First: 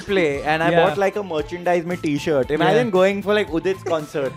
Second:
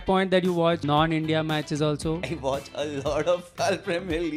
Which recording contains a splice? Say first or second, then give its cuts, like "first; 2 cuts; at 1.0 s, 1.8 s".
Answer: second; 3 cuts; at 0.8 s, 2.3 s, 3.5 s